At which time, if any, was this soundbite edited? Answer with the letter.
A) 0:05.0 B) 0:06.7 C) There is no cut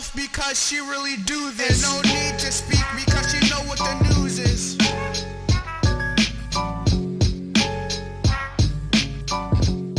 A